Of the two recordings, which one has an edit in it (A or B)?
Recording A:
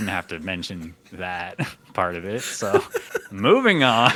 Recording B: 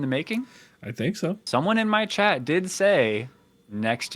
B